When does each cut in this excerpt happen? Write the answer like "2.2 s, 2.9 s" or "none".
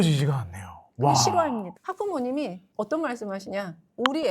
1.9 s